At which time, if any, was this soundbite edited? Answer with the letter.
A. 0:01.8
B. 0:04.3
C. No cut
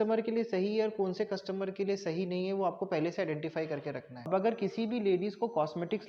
B